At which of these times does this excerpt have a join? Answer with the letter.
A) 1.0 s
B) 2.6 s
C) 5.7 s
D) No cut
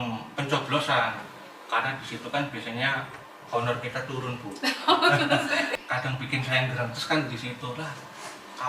C